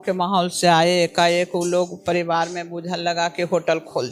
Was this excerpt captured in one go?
yes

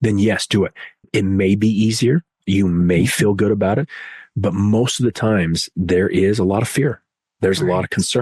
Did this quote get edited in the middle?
no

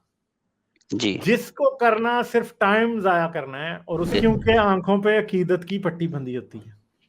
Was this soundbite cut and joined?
yes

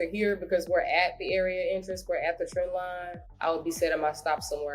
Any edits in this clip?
yes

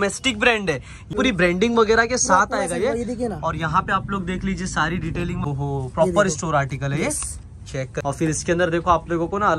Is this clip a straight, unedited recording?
no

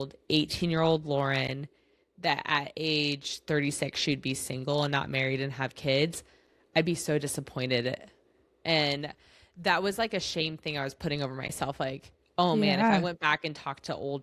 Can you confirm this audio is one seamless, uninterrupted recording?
yes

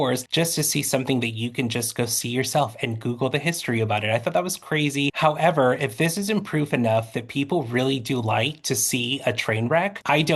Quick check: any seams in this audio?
yes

